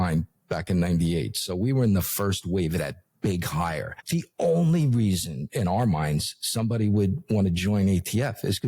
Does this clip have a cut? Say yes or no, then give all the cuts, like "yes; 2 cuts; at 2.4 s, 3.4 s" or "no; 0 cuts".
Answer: yes; 1 cut; at 4.0 s